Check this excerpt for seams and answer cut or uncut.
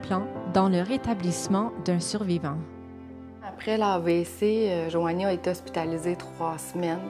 uncut